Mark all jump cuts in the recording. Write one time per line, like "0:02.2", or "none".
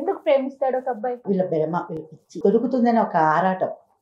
0:01.2
0:02.4